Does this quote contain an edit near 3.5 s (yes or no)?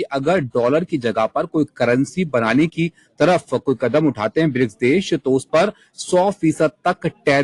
no